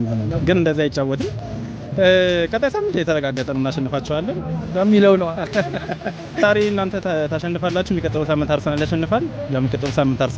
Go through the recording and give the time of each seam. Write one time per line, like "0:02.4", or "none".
0:06.4